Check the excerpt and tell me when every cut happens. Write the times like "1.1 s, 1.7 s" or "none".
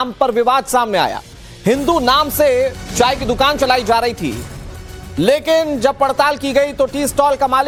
none